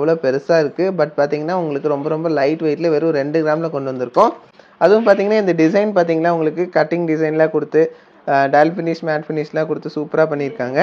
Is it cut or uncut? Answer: uncut